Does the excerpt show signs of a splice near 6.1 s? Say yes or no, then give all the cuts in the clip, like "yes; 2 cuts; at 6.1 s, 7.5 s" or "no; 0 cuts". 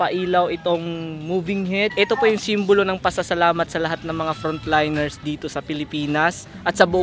no; 1 cut; at 1.9 s